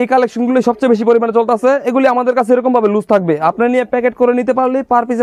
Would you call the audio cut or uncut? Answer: uncut